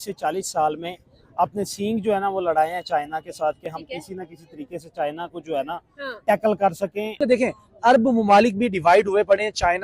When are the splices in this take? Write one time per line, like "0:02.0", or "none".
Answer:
0:07.2